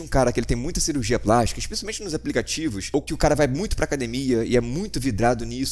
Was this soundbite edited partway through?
yes; 1 cut; at 3.1 s

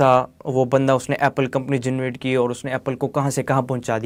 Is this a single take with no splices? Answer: yes; 0 cuts

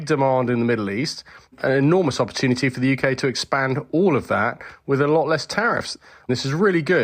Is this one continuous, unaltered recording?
no; 1 cut; at 5.9 s

